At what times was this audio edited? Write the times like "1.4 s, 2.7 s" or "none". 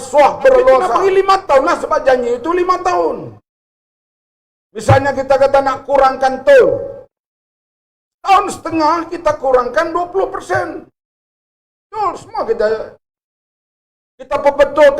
0.9 s